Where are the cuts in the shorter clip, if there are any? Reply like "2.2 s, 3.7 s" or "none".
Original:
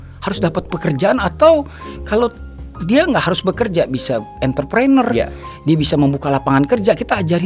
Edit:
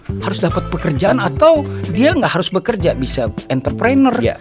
1.8 s